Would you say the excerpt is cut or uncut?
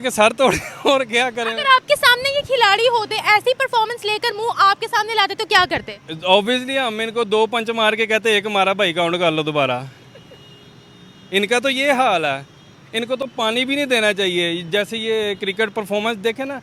uncut